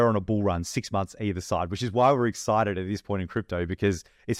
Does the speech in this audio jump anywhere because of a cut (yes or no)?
no